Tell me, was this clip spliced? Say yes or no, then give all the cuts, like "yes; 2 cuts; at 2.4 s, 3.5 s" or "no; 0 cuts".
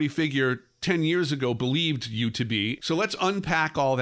yes; 1 cut; at 2.8 s